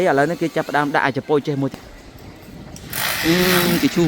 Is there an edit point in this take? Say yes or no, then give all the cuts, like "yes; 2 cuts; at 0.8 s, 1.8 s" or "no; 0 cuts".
yes; 1 cut; at 1.7 s